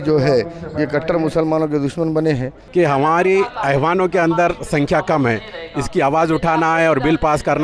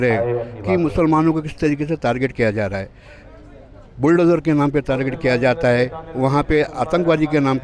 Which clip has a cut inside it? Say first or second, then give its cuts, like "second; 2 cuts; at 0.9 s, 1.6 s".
first; 1 cut; at 2.6 s